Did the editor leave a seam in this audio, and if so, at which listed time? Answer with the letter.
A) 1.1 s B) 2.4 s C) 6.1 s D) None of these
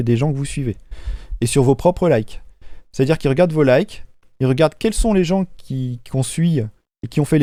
D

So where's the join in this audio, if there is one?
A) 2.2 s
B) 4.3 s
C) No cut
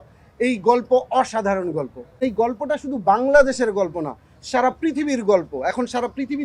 A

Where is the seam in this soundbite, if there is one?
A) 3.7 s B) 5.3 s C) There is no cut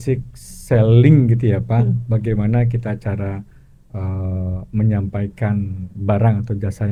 C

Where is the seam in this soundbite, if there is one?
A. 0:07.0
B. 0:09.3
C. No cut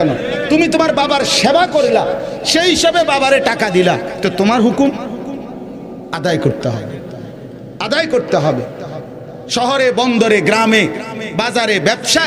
C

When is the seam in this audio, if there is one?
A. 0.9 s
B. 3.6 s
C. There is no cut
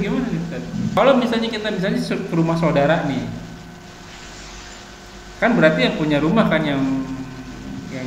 A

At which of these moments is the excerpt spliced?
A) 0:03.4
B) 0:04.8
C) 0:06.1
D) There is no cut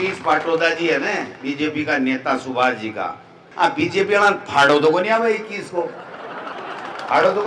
A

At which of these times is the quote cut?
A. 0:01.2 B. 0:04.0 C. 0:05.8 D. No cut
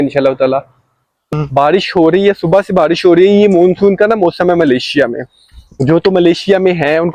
A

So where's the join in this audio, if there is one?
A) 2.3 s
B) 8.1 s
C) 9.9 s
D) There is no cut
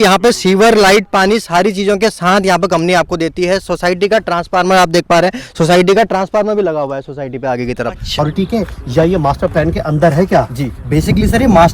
B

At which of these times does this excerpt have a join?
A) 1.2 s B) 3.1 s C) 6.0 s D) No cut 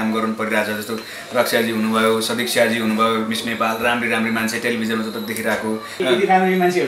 C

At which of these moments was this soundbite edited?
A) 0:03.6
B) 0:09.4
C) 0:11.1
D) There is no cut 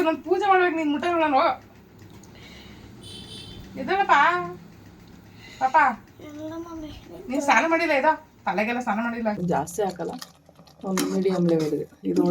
B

